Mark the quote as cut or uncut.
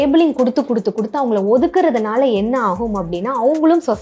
uncut